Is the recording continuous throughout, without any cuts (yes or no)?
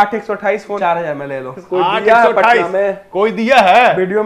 no